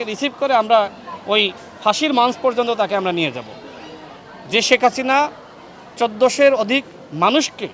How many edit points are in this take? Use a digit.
0